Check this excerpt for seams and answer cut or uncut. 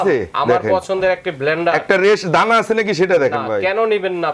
uncut